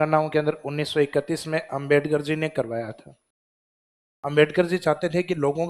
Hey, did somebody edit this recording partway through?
no; 0 cuts

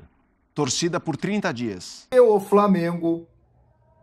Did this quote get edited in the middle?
yes; 1 cut; at 2.1 s

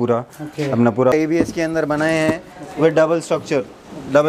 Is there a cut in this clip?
yes; 1 cut; at 1.1 s

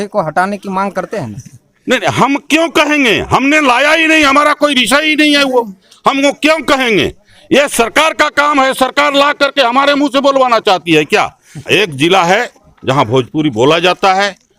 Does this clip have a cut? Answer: yes; 1 cut; at 11.6 s

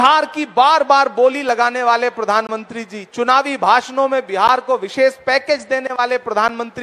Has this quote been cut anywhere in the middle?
no; 0 cuts

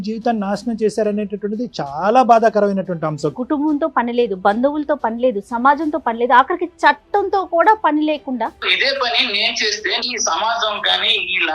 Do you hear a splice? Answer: yes; 3 cuts; at 3.3 s, 8.6 s, 10.1 s

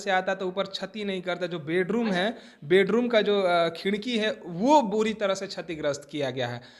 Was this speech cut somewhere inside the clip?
no; 0 cuts

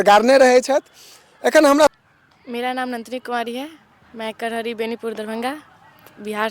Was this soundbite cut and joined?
yes; 1 cut; at 1.9 s

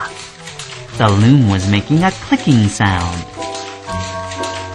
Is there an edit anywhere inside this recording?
no; 0 cuts

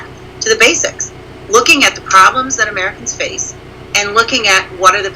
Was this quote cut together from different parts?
no; 0 cuts

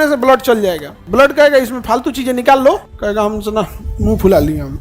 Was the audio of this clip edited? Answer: yes; 2 cuts; at 0.9 s, 2.9 s

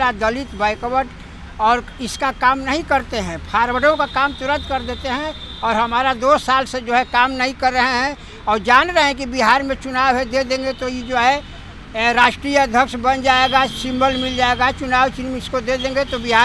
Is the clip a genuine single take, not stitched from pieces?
yes; 0 cuts

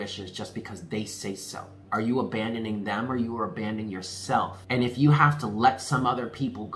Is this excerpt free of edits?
no; 2 cuts; at 1.7 s, 4.6 s

